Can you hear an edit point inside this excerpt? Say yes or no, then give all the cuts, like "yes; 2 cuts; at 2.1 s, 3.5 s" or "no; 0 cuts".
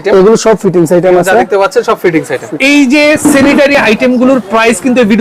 yes; 2 cuts; at 2.4 s, 3.7 s